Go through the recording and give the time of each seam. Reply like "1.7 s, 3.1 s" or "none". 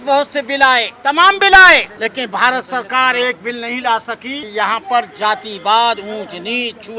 0.9 s, 1.9 s, 4.3 s